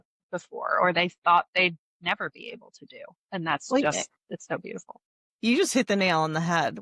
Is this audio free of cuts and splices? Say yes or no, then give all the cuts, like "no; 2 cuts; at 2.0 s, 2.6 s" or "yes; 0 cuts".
yes; 0 cuts